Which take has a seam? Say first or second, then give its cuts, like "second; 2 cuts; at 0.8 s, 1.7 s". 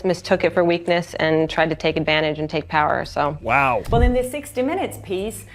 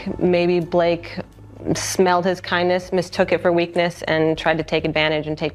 first; 1 cut; at 3.9 s